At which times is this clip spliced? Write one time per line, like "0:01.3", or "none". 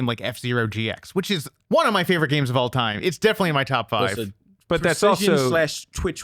0:01.5